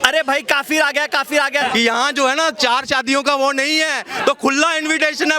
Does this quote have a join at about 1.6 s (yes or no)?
yes